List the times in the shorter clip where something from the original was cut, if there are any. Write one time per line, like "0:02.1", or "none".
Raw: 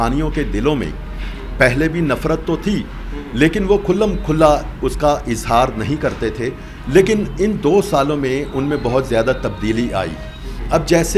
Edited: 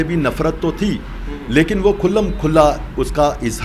none